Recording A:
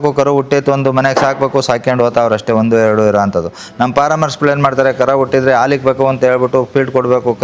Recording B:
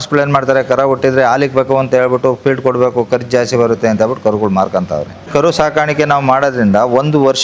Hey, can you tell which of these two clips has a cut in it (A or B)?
B